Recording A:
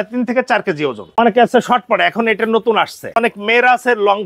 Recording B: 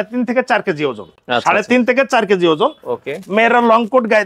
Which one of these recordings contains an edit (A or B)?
A